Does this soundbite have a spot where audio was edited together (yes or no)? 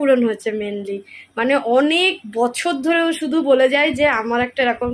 no